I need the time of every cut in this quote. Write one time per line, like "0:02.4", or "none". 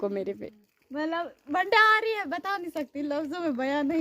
none